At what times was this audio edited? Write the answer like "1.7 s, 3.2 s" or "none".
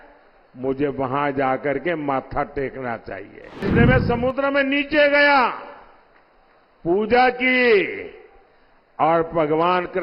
3.6 s